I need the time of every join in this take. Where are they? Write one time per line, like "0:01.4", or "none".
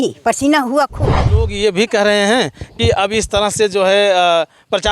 0:01.5